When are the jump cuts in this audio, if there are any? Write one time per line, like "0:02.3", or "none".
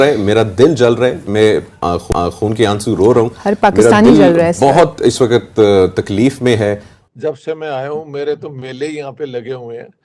0:07.0